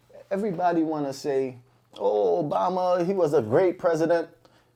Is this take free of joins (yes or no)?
yes